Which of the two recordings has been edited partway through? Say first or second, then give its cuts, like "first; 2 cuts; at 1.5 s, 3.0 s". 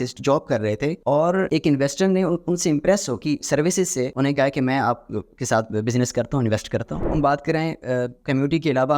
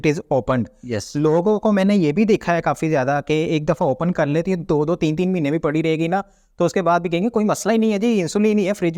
first; 4 cuts; at 1.4 s, 3.2 s, 4.1 s, 7.1 s